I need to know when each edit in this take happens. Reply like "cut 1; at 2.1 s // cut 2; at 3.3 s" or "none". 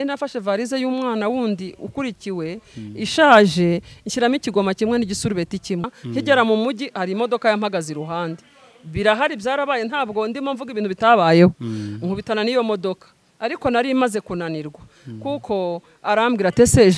cut 1; at 5.9 s